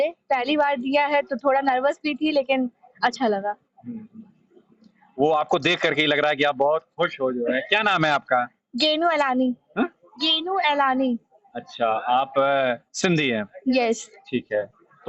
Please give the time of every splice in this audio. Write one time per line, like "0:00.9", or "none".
none